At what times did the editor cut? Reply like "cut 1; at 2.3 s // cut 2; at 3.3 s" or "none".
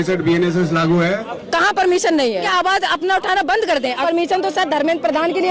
cut 1; at 1.3 s // cut 2; at 2.5 s // cut 3; at 4.0 s